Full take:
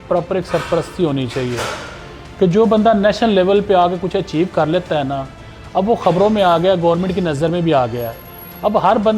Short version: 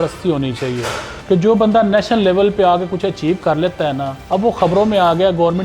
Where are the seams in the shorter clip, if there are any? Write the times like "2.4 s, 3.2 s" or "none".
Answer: 1.1 s, 4.1 s